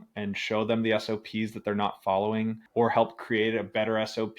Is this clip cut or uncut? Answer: cut